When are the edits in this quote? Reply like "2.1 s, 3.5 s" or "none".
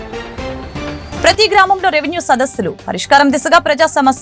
1.1 s